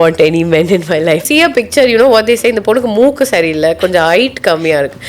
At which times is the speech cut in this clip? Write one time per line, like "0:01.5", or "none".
0:01.2

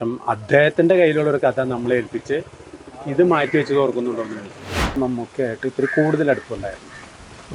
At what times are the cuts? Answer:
0:05.0

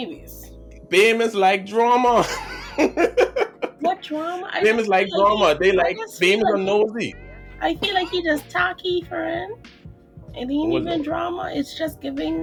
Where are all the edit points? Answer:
none

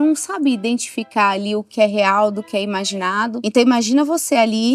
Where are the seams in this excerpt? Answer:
0:03.4

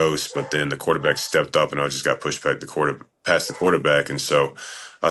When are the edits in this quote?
none

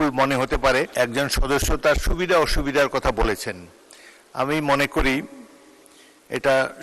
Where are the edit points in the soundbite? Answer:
0:00.9

